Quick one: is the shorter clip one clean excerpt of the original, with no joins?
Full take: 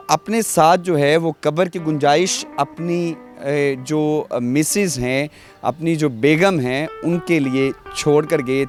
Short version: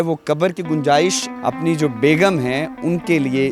no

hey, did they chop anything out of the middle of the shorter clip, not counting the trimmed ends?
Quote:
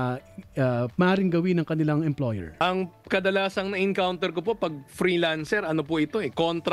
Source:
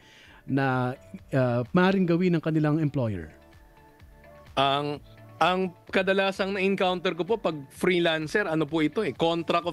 yes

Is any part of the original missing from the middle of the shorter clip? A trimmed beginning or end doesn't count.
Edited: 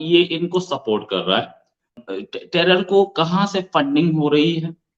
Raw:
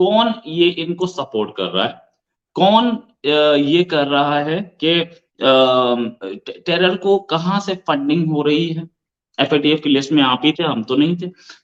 yes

